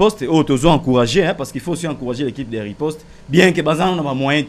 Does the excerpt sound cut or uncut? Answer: uncut